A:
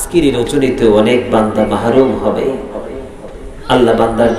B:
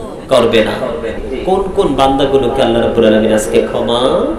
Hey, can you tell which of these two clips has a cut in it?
B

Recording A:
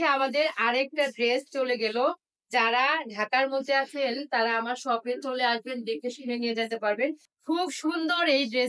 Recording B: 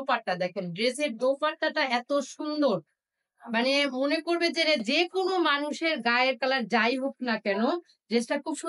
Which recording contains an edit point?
A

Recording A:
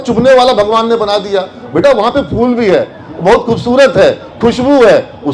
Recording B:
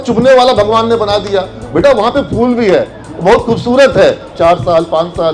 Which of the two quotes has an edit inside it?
B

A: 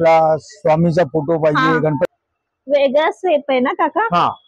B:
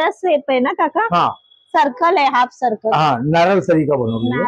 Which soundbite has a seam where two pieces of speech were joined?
A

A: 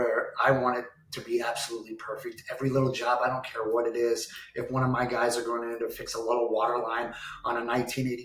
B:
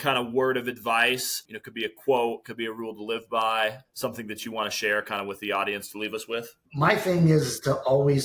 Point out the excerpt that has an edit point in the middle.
B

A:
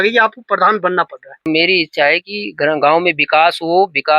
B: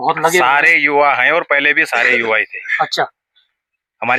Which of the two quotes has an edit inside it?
A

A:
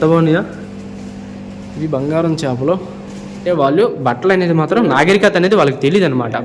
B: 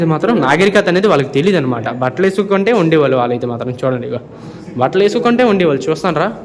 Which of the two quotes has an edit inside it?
A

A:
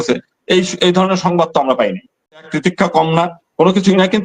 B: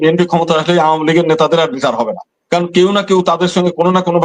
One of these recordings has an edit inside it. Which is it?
A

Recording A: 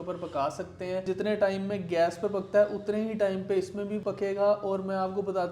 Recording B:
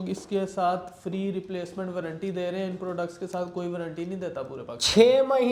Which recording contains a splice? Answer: A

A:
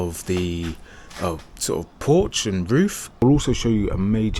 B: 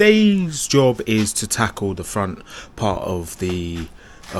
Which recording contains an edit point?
A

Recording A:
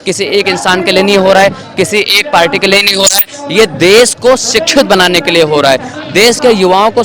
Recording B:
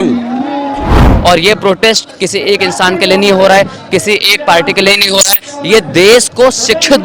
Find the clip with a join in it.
B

